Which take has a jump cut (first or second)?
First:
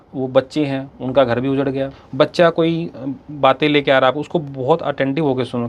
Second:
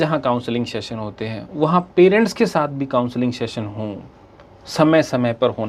first